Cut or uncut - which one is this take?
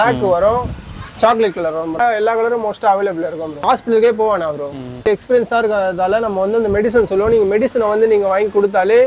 cut